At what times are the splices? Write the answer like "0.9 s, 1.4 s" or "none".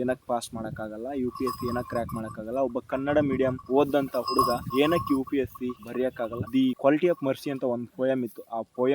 6.4 s